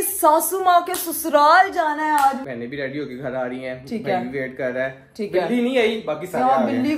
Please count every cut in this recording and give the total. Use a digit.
0